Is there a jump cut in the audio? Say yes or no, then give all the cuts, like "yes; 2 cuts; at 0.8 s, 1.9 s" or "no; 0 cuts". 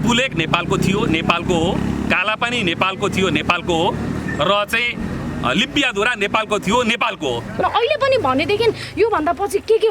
yes; 1 cut; at 7.6 s